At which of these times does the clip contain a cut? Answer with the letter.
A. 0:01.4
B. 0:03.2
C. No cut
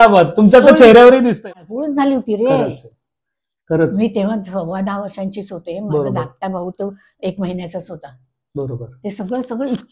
A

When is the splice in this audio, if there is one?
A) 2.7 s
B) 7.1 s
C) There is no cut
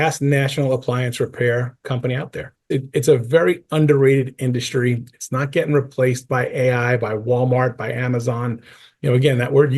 A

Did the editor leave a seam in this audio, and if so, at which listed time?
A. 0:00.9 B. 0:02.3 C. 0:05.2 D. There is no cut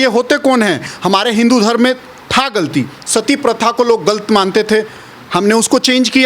A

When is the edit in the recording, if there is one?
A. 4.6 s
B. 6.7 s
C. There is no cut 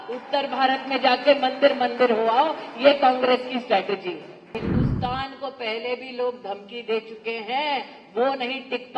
A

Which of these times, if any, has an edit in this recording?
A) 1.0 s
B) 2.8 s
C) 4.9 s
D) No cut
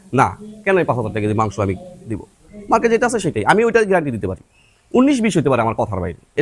D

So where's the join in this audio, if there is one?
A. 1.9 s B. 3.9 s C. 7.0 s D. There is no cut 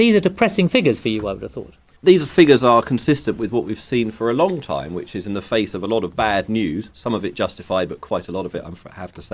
D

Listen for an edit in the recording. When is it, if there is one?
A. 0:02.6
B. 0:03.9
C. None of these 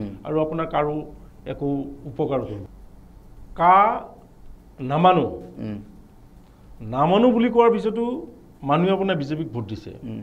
A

